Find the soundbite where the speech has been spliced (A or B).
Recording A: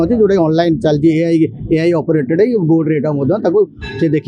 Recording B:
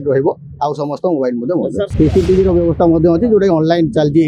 B